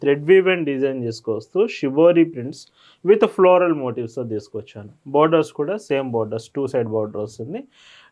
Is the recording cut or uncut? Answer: uncut